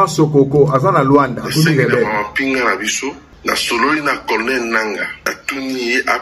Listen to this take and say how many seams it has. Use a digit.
2